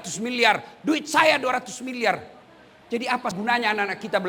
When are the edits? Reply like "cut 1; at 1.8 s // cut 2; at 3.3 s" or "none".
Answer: cut 1; at 3.4 s